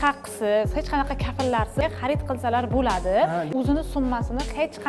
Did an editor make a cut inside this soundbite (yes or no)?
yes